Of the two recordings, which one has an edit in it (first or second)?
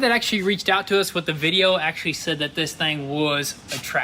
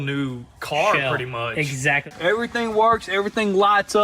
second